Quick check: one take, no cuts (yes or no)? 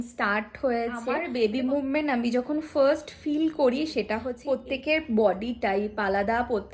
no